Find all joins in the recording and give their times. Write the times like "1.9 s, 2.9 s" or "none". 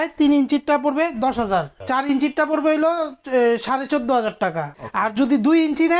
1.8 s, 4.7 s